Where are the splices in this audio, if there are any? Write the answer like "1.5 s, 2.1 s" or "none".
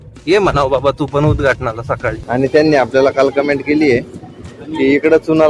2.2 s